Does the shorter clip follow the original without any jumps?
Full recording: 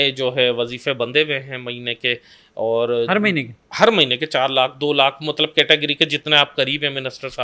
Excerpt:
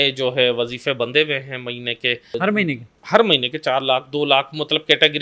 no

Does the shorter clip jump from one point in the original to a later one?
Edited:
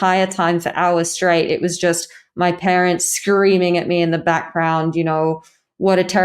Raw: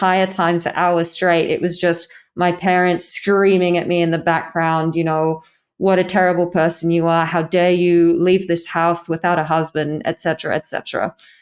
no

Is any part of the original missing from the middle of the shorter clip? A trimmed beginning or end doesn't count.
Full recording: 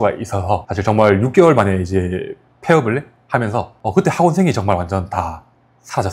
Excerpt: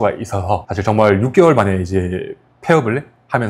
no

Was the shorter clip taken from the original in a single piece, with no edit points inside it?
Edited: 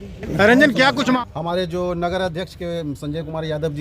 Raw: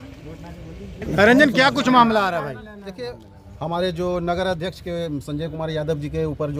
no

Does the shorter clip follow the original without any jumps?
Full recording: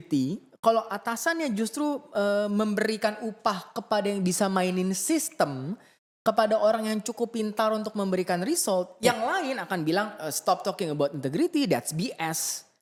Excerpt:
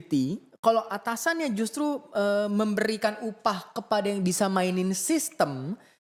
yes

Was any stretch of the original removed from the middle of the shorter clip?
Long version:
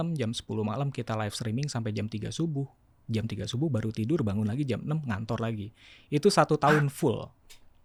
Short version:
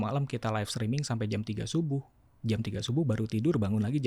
no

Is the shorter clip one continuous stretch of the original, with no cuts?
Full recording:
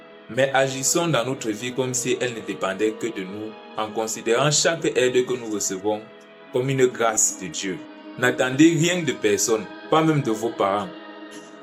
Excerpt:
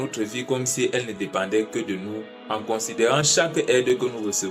yes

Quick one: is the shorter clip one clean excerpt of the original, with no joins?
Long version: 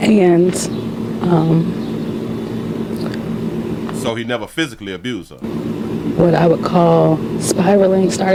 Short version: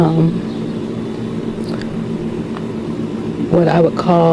no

